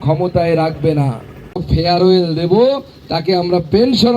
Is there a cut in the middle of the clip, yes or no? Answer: yes